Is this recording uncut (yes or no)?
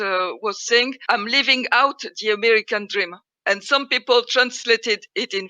no